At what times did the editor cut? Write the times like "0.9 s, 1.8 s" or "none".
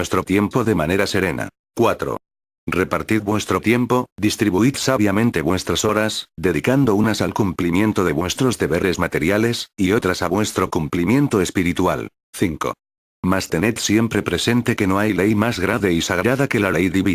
none